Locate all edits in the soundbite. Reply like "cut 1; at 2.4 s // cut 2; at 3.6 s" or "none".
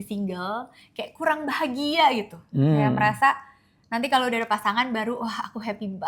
none